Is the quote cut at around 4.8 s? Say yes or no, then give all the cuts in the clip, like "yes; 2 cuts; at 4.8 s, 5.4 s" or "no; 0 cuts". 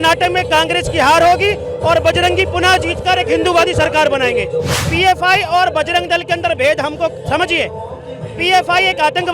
yes; 1 cut; at 4.8 s